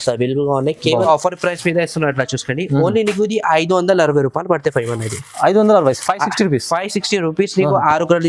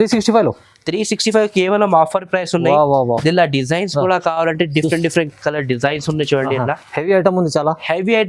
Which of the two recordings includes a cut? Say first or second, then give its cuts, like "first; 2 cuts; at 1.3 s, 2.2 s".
first; 1 cut; at 1.0 s